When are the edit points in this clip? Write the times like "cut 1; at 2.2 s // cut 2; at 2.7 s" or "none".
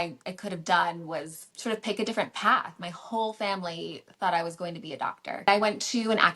cut 1; at 1.4 s // cut 2; at 5.5 s